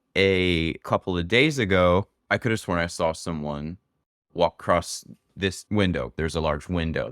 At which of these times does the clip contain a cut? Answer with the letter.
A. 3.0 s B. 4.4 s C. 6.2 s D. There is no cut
C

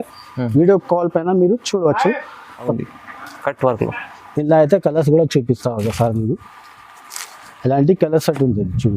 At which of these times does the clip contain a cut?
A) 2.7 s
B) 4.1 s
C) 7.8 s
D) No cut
A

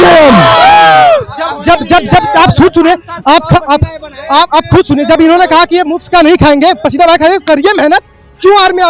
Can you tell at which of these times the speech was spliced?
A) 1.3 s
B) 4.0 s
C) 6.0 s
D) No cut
D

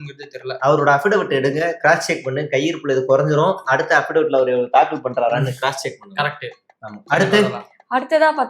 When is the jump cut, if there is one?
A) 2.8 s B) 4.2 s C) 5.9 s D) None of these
D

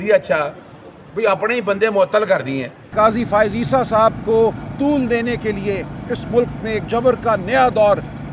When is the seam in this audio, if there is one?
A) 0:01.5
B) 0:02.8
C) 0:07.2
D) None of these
B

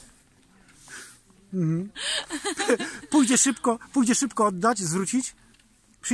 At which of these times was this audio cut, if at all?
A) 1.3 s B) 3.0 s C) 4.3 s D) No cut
D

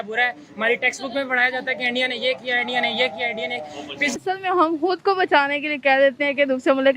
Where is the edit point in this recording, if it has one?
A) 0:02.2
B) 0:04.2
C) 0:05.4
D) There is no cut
B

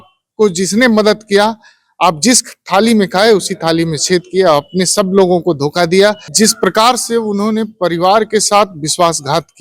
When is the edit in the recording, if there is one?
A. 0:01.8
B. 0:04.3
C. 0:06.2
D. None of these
C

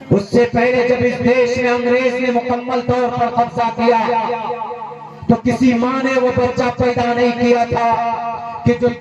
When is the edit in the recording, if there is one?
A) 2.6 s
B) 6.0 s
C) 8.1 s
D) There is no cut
D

